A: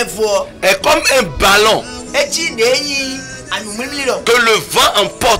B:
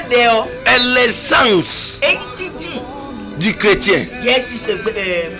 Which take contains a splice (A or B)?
A